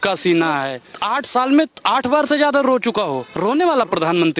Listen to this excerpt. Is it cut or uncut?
cut